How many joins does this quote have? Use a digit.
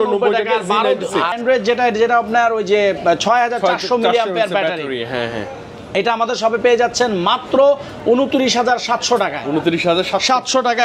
1